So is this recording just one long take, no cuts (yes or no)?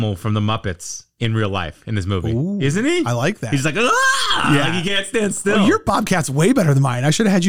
yes